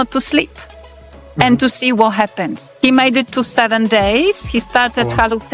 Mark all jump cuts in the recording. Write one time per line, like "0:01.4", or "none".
0:02.6